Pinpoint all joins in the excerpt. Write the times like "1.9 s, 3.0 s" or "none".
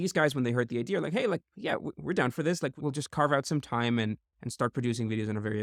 none